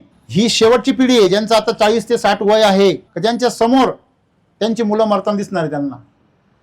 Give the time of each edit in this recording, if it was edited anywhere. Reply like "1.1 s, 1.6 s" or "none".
3.1 s